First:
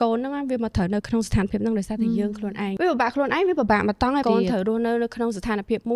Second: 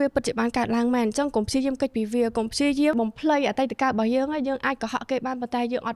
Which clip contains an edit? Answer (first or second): first